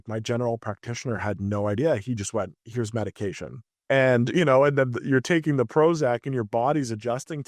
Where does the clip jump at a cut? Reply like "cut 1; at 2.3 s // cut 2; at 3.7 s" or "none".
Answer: cut 1; at 3.7 s